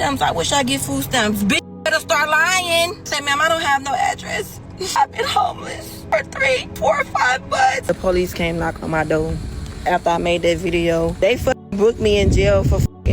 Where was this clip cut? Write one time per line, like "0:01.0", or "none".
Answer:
0:03.1
0:05.0
0:05.9
0:06.7
0:07.8
0:11.1